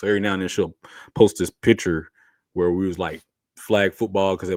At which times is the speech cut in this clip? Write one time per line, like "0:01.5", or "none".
none